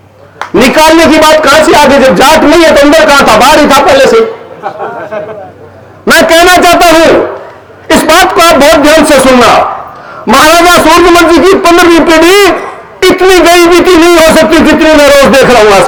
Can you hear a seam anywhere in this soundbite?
no; 0 cuts

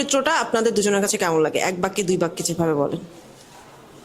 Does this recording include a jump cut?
no; 0 cuts

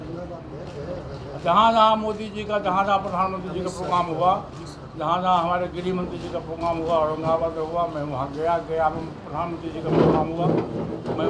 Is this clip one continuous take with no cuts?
yes; 0 cuts

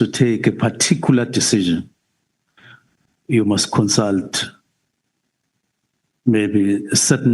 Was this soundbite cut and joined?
no; 0 cuts

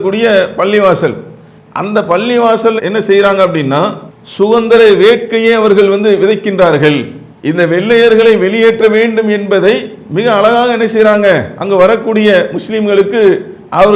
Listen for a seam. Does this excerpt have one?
no; 0 cuts

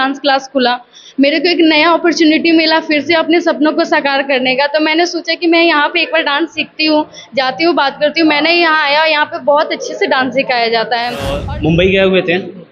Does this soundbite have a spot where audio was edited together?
yes; 1 cut; at 11.3 s

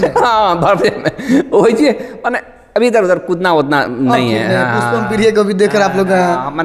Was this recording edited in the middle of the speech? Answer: no; 0 cuts

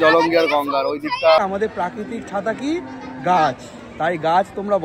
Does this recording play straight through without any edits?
no; 1 cut; at 1.4 s

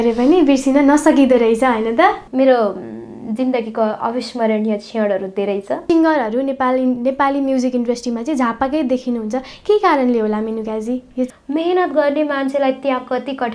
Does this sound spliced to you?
yes; 3 cuts; at 2.2 s, 5.8 s, 11.4 s

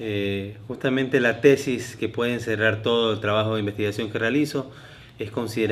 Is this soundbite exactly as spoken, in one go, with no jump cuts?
yes; 0 cuts

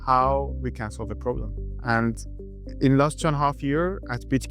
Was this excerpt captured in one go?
yes; 0 cuts

